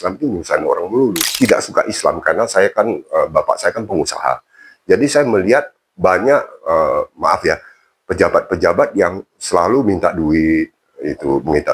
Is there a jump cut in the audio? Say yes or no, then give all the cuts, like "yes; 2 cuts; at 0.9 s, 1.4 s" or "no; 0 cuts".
yes; 1 cut; at 1.2 s